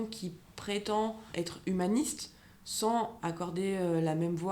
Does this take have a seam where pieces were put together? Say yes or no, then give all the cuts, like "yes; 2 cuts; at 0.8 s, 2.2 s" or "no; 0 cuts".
yes; 1 cut; at 3.1 s